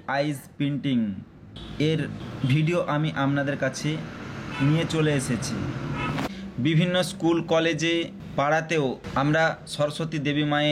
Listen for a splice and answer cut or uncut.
cut